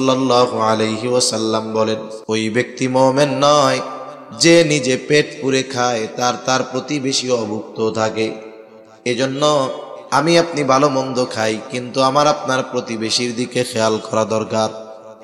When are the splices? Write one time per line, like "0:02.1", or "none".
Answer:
0:02.1